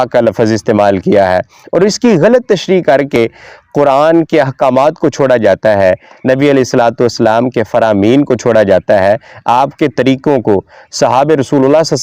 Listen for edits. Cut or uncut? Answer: uncut